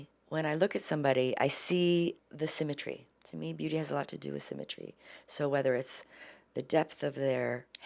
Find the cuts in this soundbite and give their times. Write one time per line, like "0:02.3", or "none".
none